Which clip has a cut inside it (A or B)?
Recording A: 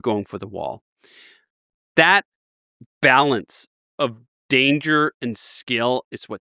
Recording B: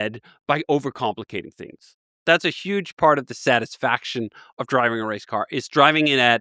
B